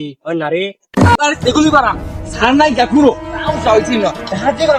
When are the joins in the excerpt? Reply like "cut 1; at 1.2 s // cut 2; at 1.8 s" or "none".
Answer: cut 1; at 1.2 s